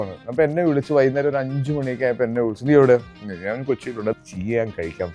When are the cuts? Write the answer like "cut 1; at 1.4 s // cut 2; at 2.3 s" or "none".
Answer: cut 1; at 4.2 s